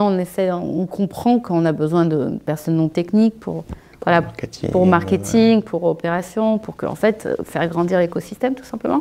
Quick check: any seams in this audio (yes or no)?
no